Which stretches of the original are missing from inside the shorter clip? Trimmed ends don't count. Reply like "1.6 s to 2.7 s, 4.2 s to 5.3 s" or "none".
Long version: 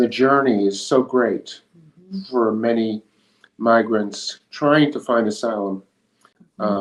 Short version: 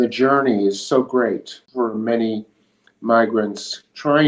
1.6 s to 2.1 s